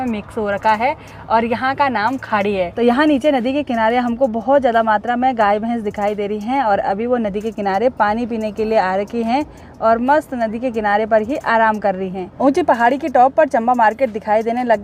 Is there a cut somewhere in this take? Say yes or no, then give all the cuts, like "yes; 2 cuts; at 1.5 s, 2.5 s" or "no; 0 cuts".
no; 0 cuts